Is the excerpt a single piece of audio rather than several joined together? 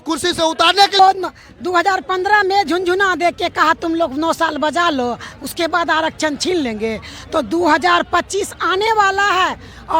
no; 1 cut; at 1.0 s

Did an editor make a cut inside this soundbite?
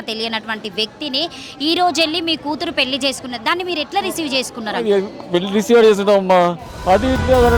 no; 0 cuts

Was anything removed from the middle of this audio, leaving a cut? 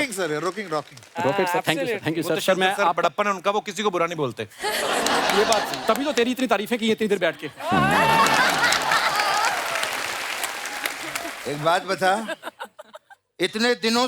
yes; 1 cut; at 11.3 s

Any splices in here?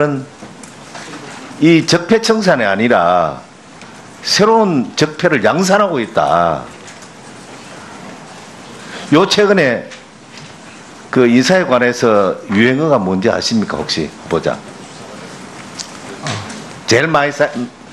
no; 0 cuts

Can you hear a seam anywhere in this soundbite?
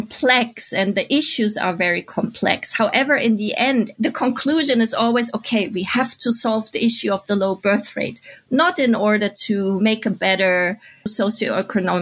no; 0 cuts

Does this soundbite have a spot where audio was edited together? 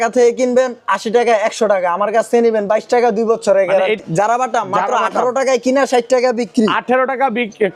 yes; 1 cut; at 4.0 s

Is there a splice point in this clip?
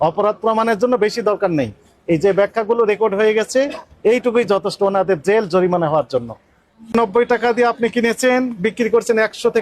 yes; 1 cut; at 6.9 s

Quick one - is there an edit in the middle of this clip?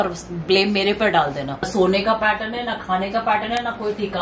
no; 0 cuts

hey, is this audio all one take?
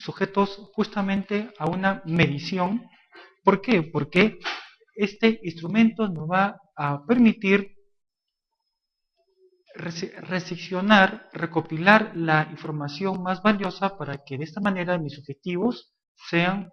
no; 1 cut; at 10.6 s

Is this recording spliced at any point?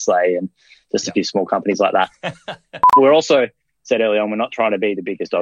yes; 1 cut; at 3.0 s

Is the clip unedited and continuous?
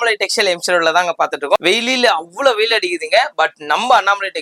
no; 1 cut; at 1.6 s

